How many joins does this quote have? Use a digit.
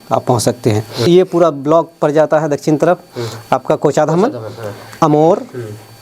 1